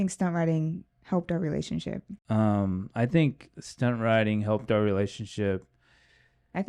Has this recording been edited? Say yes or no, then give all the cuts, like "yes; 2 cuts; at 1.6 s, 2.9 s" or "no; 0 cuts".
no; 0 cuts